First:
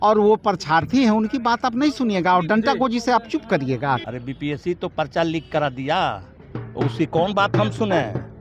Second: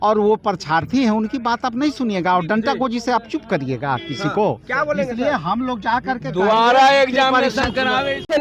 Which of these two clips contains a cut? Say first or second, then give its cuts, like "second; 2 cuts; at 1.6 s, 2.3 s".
first; 1 cut; at 4.0 s